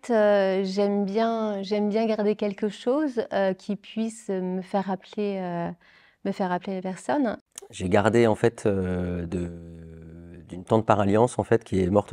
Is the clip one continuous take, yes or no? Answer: no